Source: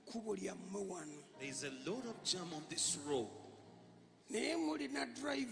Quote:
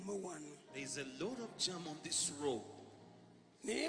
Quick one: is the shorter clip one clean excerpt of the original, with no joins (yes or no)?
yes